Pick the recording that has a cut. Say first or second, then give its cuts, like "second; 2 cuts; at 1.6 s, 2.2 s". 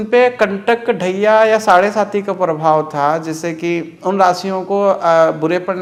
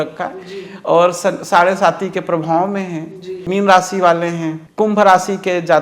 second; 2 cuts; at 3.4 s, 4.6 s